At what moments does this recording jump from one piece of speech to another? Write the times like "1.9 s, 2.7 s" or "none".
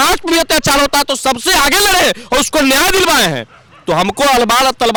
none